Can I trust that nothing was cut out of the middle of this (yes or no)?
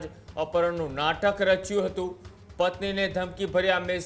yes